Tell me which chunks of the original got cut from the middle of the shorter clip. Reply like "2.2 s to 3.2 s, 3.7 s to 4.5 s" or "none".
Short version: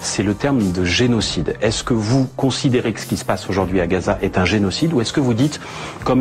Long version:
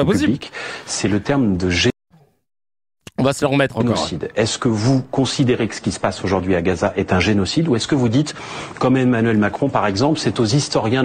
1.9 s to 3.8 s